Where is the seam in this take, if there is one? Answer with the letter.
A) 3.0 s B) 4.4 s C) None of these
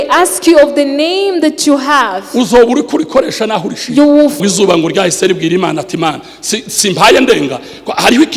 B